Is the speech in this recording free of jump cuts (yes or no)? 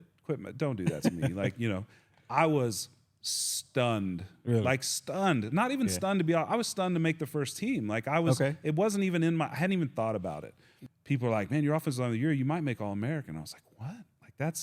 no